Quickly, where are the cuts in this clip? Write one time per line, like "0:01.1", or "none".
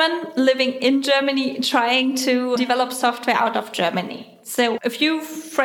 0:02.6
0:04.7